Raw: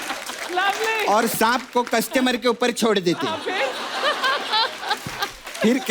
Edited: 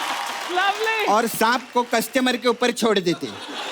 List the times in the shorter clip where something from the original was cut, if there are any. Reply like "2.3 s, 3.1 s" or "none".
none